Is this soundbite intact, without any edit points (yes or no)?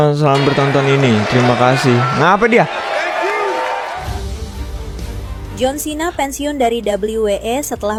yes